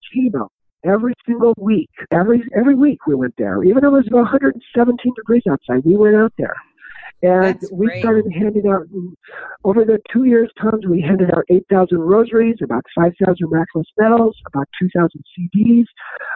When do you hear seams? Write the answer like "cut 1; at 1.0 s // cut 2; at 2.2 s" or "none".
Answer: cut 1; at 2.0 s

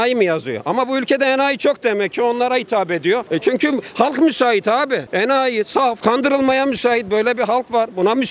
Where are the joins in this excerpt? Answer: cut 1; at 3.3 s

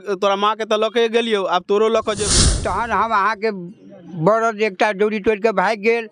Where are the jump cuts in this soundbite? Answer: cut 1; at 2.3 s

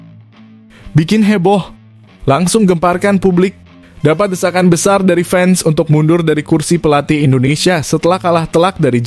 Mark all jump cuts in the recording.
cut 1; at 0.9 s

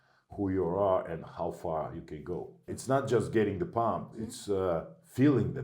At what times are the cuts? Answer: cut 1; at 2.7 s

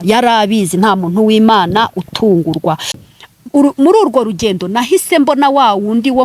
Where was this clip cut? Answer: cut 1; at 3.0 s

